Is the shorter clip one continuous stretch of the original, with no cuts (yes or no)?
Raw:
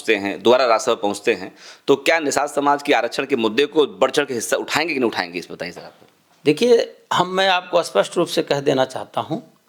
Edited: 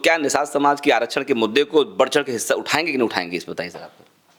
yes